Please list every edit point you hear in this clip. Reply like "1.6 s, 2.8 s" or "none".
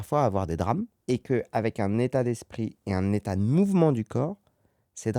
0.9 s